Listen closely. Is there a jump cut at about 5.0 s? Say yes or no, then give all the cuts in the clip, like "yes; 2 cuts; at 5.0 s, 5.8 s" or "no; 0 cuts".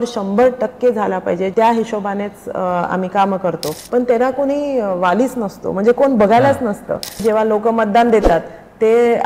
no; 3 cuts; at 1.5 s, 3.7 s, 7.2 s